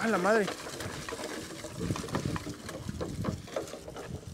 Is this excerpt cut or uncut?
uncut